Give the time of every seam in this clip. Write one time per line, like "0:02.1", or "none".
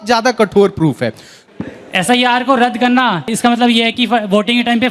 0:01.4
0:03.3